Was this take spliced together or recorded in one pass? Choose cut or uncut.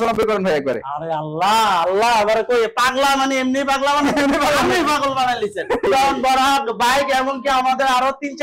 cut